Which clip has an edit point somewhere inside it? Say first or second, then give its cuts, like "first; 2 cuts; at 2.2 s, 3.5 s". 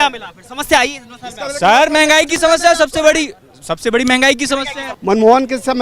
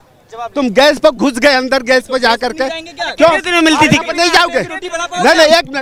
first; 1 cut; at 4.8 s